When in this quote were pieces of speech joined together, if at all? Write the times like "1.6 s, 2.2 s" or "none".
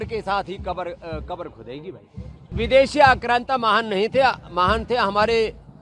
2.5 s